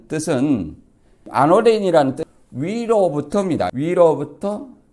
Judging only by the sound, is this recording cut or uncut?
cut